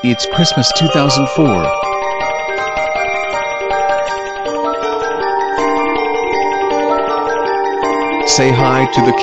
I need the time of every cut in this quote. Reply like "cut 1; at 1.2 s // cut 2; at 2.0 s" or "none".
cut 1; at 4.5 s

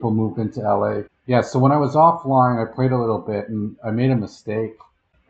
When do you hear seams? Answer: none

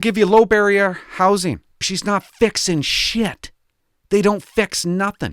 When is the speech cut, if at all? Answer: cut 1; at 1.8 s

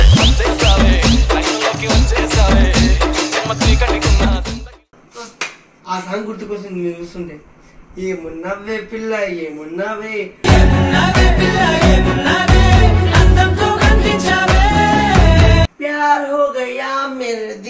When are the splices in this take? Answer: cut 1; at 15.7 s

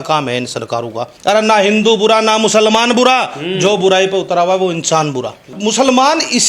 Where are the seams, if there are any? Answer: cut 1; at 1.1 s // cut 2; at 5.5 s

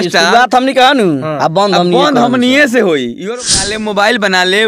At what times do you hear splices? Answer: cut 1; at 3.4 s

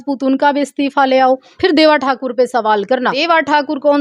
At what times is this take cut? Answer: cut 1; at 1.5 s // cut 2; at 3.2 s

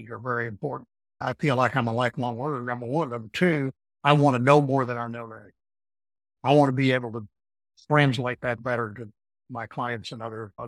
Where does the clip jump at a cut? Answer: cut 1; at 1.2 s // cut 2; at 3.8 s

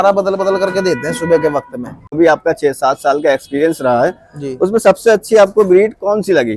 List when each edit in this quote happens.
cut 1; at 2.2 s

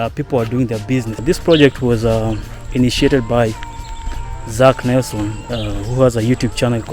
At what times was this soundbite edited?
cut 1; at 1.2 s

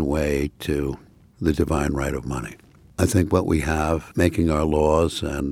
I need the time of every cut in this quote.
cut 1; at 4.1 s

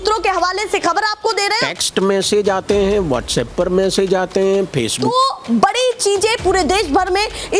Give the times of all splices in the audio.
cut 1; at 1.6 s // cut 2; at 5.0 s

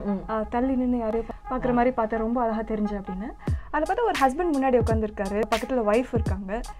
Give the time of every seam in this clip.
cut 1; at 1.4 s // cut 2; at 5.5 s

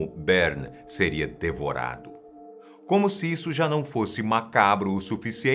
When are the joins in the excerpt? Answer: none

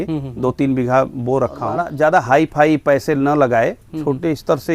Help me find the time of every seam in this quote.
cut 1; at 1.9 s

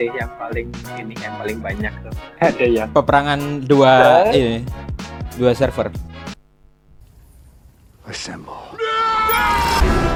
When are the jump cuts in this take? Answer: none

